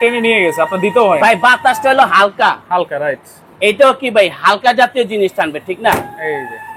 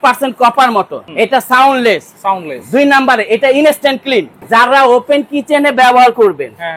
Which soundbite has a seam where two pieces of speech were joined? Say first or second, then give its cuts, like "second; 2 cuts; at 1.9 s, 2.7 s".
second; 2 cuts; at 1.0 s, 4.4 s